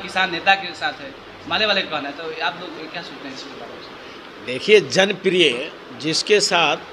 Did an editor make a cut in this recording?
no; 0 cuts

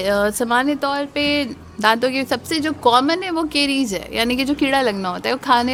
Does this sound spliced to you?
no; 0 cuts

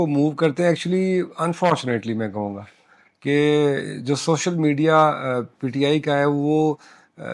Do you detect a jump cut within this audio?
no; 0 cuts

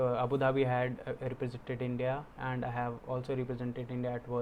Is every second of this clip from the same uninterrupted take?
yes; 0 cuts

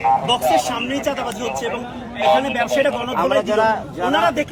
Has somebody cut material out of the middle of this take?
no; 0 cuts

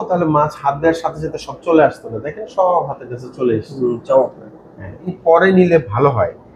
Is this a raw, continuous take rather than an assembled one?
no; 1 cut; at 5.2 s

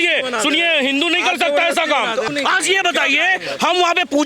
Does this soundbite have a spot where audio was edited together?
yes; 1 cut; at 2.3 s

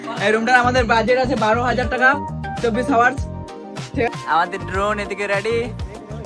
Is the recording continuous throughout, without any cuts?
no; 1 cut; at 4.1 s

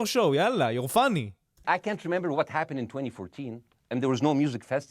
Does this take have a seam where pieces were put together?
yes; 1 cut; at 1.6 s

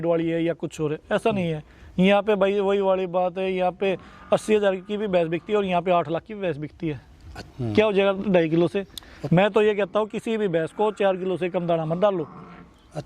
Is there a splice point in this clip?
yes; 1 cut; at 7.5 s

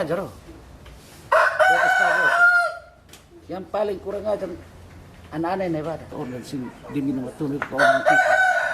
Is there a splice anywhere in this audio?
yes; 1 cut; at 6.1 s

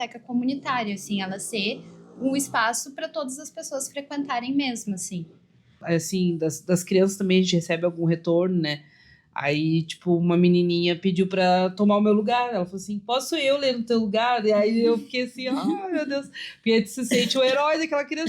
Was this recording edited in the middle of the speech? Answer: yes; 1 cut; at 5.8 s

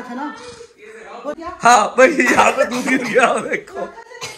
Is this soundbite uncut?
yes; 0 cuts

